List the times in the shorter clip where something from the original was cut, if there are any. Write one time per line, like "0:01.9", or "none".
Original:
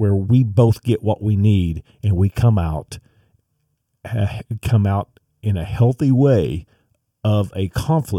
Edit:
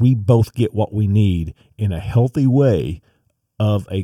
0:01.6